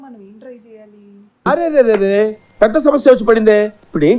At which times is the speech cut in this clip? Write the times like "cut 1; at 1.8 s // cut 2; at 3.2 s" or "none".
none

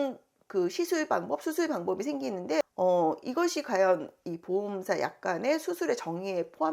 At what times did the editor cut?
cut 1; at 2.6 s

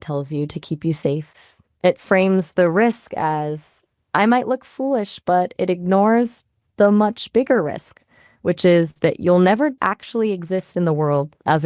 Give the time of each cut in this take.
cut 1; at 9.8 s

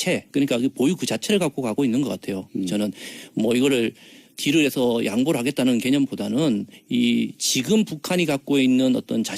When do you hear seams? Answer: cut 1; at 2.8 s

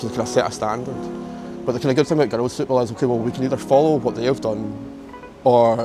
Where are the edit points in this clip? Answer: none

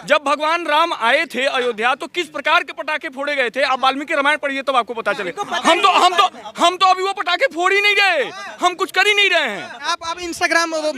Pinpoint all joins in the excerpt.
cut 1; at 9.9 s

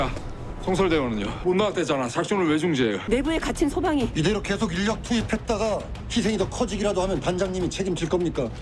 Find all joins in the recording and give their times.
cut 1; at 1.3 s // cut 2; at 3.0 s

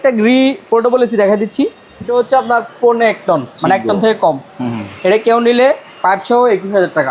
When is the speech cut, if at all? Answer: cut 1; at 2.0 s

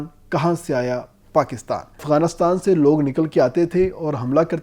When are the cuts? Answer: cut 1; at 2.0 s

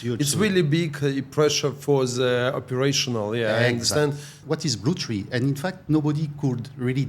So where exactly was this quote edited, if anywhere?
cut 1; at 4.4 s

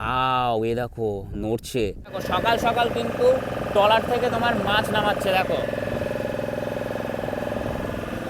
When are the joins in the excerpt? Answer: cut 1; at 2.2 s

